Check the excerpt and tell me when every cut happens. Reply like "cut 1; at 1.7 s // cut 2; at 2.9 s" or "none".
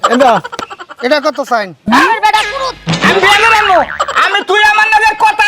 cut 1; at 1.8 s